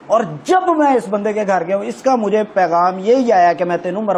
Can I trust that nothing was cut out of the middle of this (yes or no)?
yes